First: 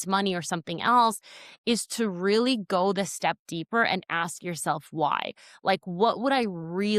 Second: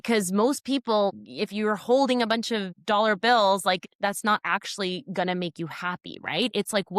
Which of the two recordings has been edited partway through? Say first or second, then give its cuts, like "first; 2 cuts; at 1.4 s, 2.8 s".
second; 3 cuts; at 1.1 s, 2.7 s, 3.8 s